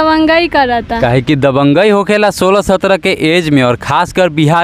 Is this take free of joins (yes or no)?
yes